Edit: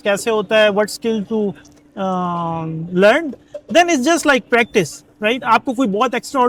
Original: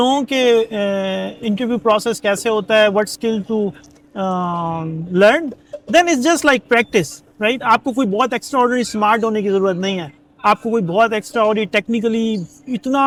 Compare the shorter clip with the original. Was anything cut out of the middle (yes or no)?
no